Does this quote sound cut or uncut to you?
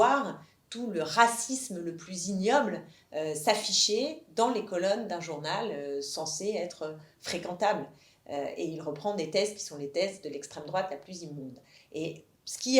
uncut